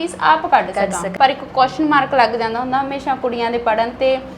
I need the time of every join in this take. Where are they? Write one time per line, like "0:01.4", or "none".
0:01.1